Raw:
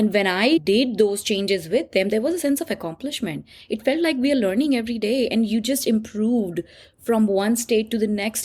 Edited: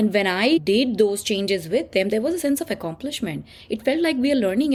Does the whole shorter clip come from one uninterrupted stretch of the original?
yes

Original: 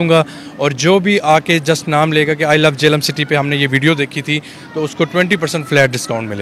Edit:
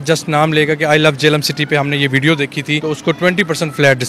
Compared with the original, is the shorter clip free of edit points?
no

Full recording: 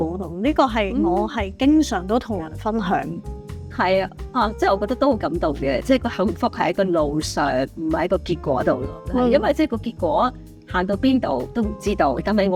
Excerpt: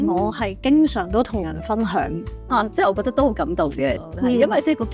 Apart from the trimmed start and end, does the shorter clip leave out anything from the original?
yes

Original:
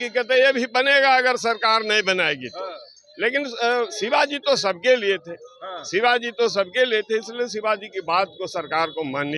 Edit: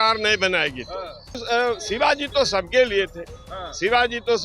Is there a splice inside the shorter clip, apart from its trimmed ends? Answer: yes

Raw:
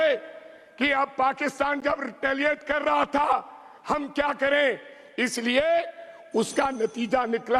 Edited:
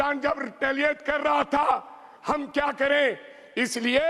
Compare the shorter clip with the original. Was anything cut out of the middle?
no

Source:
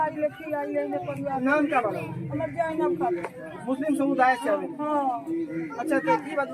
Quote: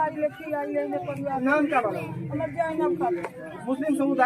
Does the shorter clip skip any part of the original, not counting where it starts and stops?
no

